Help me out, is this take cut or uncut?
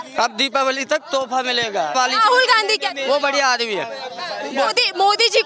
cut